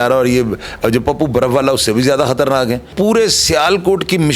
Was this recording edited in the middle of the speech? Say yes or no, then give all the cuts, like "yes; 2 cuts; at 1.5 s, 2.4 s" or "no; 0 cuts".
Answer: yes; 1 cut; at 2.9 s